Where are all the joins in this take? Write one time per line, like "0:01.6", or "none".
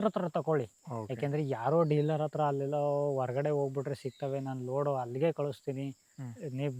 none